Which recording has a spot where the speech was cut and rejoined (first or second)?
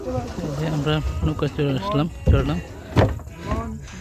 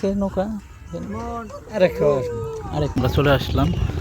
second